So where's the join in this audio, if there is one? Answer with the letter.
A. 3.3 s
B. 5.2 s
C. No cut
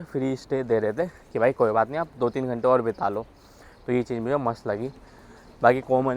C